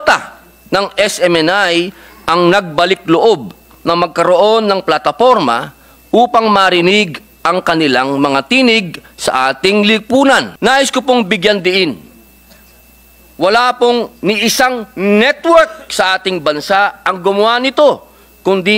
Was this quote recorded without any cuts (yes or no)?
no